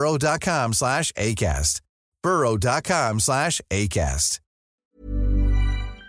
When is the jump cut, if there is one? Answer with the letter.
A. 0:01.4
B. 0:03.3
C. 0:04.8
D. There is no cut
C